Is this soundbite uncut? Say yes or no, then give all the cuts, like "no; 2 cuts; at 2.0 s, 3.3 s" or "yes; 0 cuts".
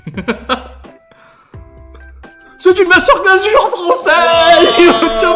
yes; 0 cuts